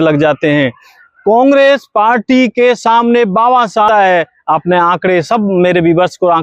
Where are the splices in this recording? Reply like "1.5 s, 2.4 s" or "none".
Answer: 3.9 s